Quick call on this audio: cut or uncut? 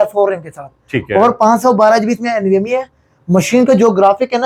uncut